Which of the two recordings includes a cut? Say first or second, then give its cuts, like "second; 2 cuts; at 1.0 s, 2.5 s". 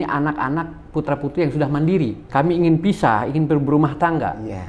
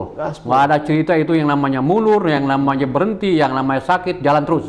first; 1 cut; at 2.2 s